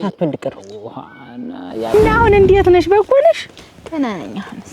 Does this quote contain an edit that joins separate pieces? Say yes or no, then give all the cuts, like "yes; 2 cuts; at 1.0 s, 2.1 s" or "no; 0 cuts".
yes; 1 cut; at 1.9 s